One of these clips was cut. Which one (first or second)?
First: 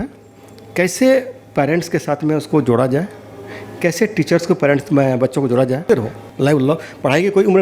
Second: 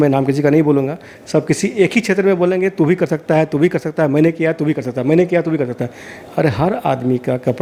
first